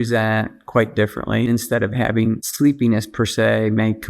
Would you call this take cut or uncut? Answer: cut